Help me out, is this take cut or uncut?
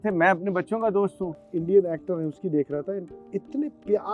cut